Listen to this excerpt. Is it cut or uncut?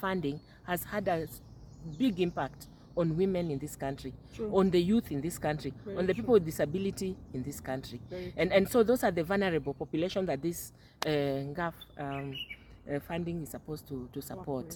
uncut